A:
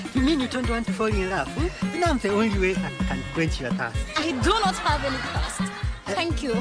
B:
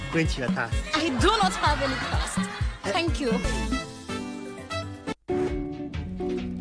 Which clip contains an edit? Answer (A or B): B